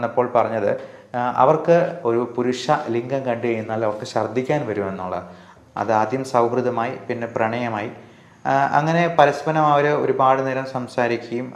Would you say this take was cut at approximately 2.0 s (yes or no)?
yes